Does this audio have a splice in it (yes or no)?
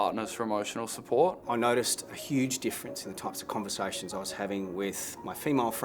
yes